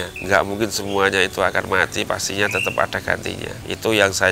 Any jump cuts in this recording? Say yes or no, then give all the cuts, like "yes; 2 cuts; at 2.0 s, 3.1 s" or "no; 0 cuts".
no; 0 cuts